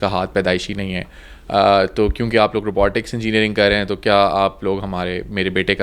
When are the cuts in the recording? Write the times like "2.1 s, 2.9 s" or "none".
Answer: none